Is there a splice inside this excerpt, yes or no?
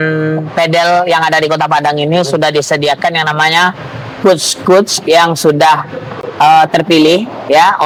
no